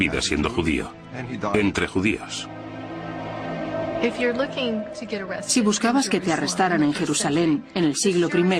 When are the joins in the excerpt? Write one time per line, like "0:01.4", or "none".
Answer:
0:07.1